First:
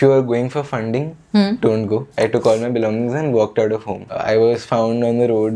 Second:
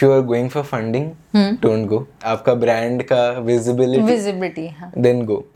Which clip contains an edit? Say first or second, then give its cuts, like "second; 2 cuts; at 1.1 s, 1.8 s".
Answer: first; 2 cuts; at 2.1 s, 4.2 s